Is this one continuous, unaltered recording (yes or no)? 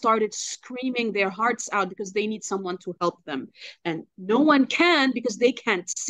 yes